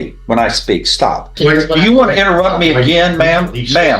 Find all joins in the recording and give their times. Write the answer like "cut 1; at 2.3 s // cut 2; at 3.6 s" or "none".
cut 1; at 1.3 s

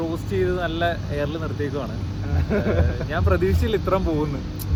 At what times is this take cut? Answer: none

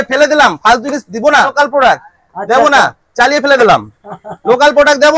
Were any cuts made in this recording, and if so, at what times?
cut 1; at 1.5 s

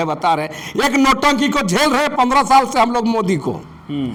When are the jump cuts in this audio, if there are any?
none

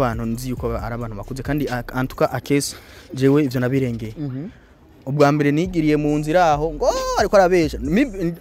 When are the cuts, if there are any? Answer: none

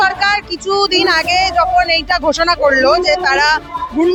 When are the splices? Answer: none

